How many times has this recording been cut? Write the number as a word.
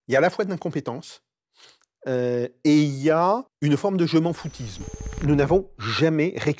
two